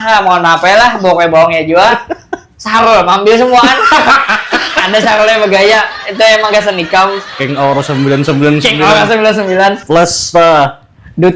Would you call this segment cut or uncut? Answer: cut